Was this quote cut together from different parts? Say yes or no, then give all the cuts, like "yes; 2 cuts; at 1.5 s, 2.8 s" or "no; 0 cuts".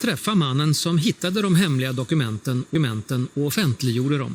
no; 0 cuts